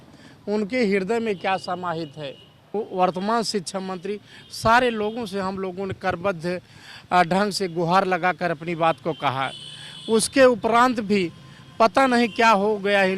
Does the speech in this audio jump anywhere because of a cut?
yes; 1 cut; at 2.7 s

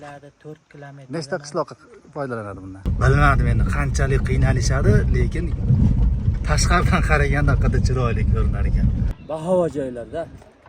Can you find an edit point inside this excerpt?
yes; 2 cuts; at 2.8 s, 9.1 s

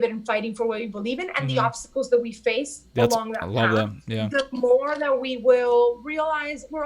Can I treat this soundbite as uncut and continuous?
yes; 0 cuts

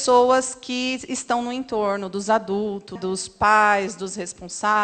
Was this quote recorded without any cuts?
no; 1 cut; at 3.0 s

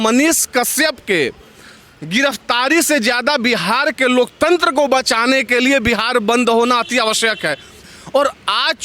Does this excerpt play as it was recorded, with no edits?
no; 1 cut; at 7.9 s

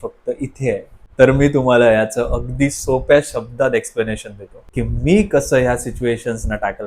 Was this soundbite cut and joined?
yes; 1 cut; at 1.0 s

